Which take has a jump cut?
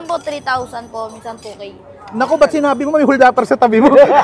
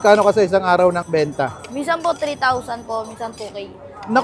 second; 1 cut; at 1.0 s

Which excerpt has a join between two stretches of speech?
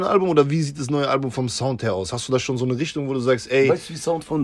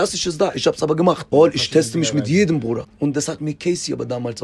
second; 2 cuts; at 1.2 s, 2.9 s

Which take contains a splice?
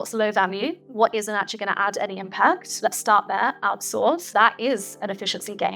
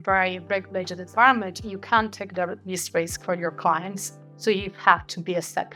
first; 3 cuts; at 0.8 s, 2.7 s, 4.2 s

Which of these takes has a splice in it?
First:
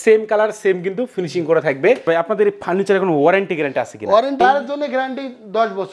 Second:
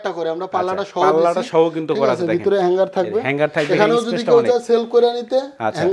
first; 2 cuts; at 2.1 s, 4.4 s

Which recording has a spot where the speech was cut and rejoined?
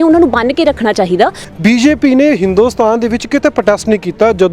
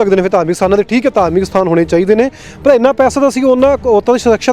first; 1 cut; at 1.5 s

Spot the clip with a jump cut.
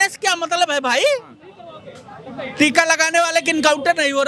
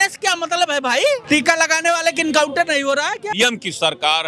second; 2 cuts; at 1.2 s, 3.3 s

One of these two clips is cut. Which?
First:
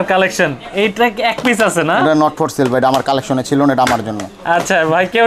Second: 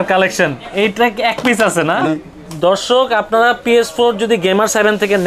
second; 1 cut; at 2.1 s

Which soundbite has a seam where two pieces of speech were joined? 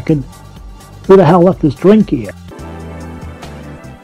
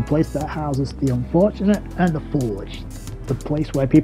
first; 1 cut; at 2.5 s

